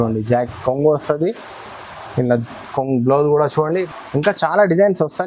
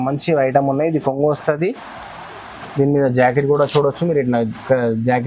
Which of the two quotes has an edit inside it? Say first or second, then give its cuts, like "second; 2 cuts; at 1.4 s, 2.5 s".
first; 1 cut; at 3.8 s